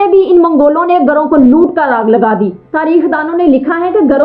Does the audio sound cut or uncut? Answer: uncut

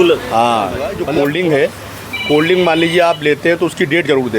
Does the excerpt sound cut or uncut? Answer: cut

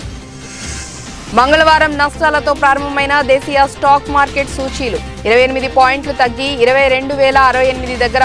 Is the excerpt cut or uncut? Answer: uncut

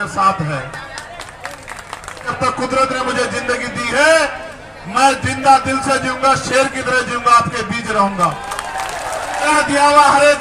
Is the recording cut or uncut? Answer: cut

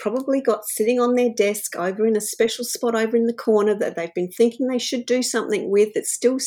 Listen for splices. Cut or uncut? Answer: uncut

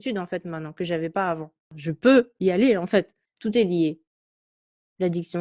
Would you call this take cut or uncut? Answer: cut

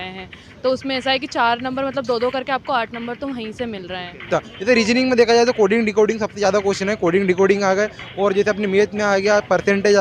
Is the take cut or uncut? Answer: cut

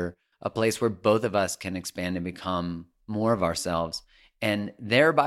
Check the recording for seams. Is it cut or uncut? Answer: uncut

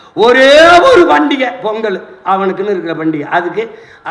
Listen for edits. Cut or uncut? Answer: uncut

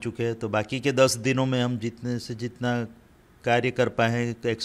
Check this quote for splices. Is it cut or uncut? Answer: uncut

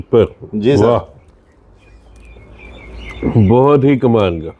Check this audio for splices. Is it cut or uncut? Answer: uncut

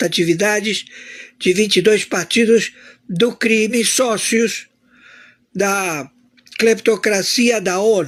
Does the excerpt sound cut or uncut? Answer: uncut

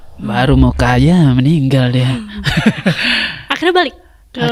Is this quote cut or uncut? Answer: uncut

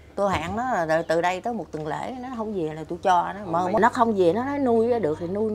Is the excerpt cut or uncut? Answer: cut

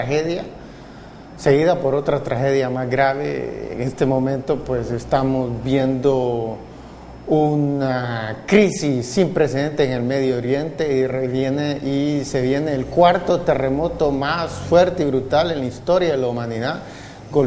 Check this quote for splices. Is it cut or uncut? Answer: uncut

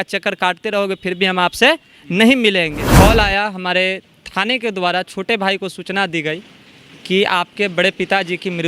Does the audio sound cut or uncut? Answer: cut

